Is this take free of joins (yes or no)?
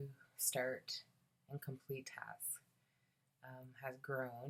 yes